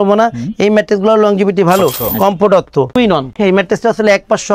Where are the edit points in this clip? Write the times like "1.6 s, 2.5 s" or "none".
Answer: 2.0 s, 3.1 s